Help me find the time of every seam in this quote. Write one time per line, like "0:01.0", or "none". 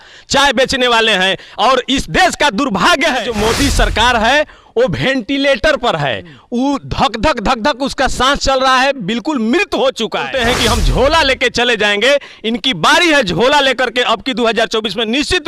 0:03.2
0:10.3